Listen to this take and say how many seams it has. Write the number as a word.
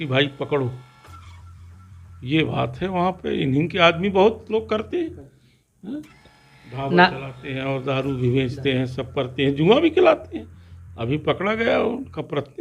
zero